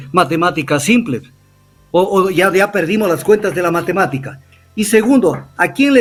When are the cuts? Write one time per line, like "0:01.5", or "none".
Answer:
none